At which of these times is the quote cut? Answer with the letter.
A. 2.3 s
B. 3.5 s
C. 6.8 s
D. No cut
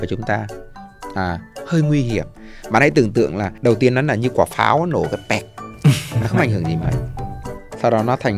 B